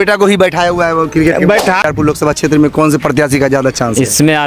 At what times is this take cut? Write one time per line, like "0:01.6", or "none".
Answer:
0:01.8